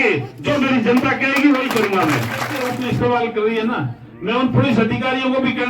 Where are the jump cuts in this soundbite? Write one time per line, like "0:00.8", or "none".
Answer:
0:02.5

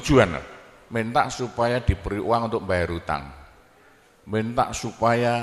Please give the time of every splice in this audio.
none

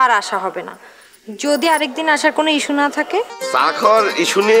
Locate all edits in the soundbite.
0:03.4

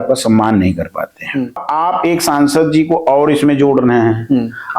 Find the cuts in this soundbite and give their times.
0:01.7

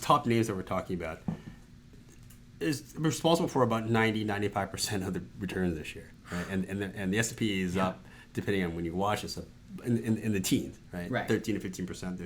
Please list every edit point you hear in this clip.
0:02.0

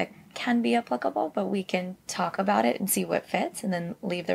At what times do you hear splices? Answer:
0:02.0

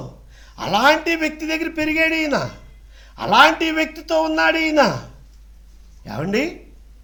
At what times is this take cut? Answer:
none

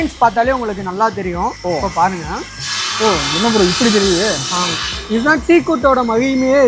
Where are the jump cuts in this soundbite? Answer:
none

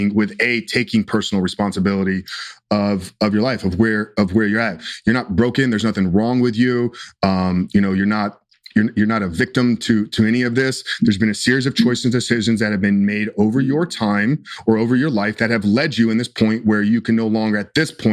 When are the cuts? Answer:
none

